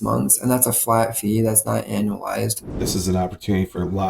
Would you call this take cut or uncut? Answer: cut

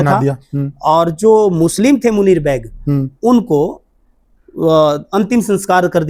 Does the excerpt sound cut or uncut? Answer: uncut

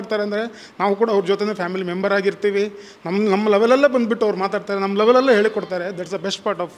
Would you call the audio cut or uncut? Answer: uncut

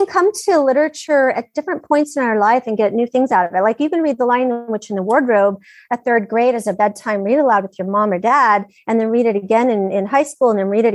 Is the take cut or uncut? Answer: cut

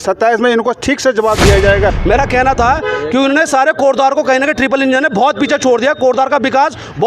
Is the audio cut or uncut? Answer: cut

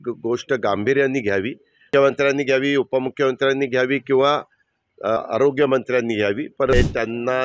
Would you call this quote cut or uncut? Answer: cut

